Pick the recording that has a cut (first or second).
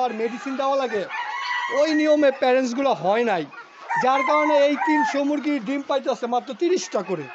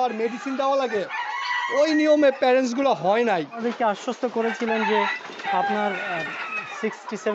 second